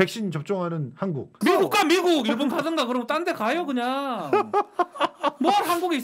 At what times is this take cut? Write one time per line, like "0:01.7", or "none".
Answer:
0:01.4